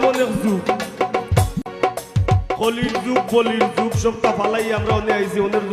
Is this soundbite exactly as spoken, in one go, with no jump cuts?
no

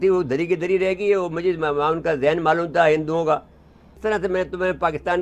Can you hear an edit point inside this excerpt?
yes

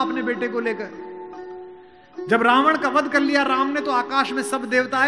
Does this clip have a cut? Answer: no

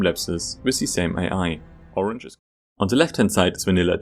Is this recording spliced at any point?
yes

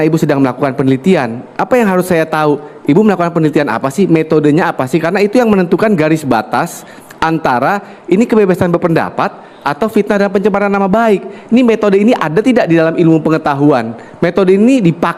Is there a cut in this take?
no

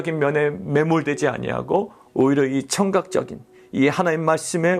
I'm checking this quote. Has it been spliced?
no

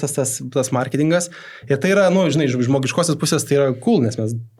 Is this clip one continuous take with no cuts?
yes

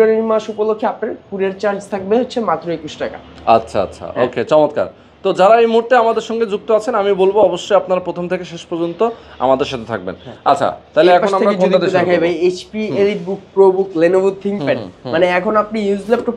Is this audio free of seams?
yes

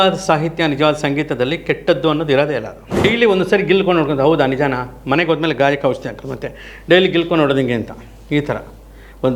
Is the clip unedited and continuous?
no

